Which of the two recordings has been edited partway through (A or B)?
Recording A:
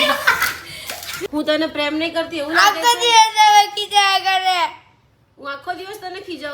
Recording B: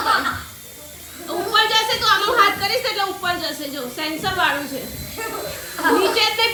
A